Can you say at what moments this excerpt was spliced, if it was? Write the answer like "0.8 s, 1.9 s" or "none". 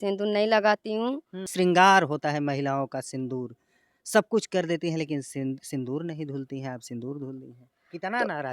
1.5 s